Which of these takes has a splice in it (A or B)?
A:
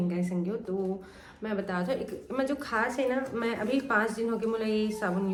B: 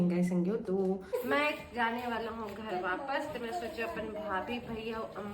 B